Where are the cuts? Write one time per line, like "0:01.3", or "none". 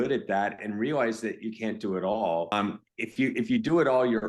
0:02.5